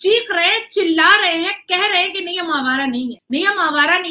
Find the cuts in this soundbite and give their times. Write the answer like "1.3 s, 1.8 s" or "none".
3.2 s